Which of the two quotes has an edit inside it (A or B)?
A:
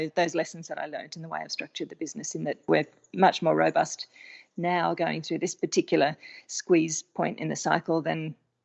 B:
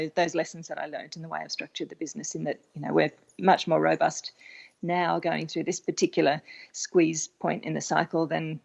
A